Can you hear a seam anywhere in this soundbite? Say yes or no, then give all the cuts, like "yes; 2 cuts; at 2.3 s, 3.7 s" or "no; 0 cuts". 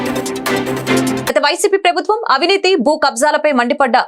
yes; 1 cut; at 1.2 s